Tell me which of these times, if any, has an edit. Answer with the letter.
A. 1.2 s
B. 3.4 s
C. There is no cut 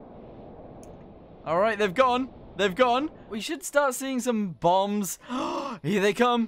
B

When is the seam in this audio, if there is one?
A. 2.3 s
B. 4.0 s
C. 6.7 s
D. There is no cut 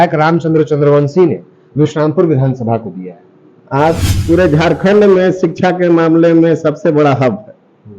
B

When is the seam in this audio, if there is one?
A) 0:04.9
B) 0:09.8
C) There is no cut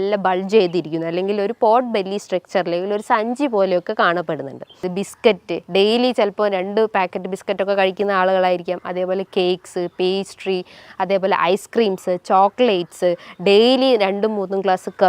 A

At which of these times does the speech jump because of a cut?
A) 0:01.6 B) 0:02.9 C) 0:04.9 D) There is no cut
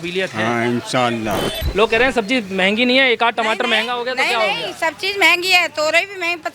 A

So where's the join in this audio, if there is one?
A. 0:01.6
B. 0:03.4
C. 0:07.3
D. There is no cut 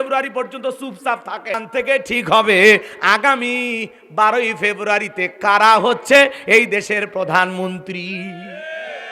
A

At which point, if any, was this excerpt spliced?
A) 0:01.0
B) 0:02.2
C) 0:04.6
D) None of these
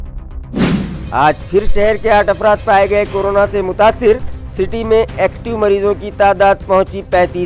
A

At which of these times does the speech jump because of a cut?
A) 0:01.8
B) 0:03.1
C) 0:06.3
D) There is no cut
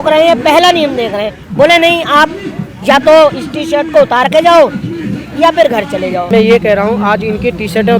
C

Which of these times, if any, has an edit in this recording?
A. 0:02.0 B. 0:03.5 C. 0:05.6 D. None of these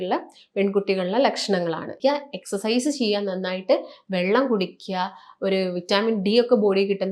A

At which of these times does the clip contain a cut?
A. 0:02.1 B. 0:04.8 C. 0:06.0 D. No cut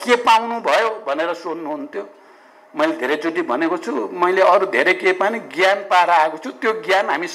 D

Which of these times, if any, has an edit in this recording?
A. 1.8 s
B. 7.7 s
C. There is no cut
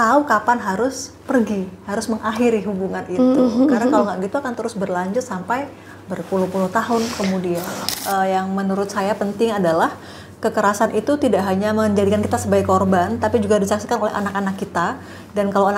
B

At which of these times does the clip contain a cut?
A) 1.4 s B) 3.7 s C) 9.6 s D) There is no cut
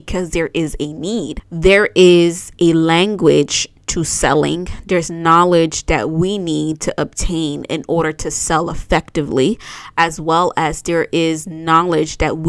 A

